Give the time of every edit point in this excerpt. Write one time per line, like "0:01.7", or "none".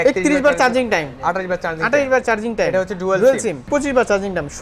0:03.6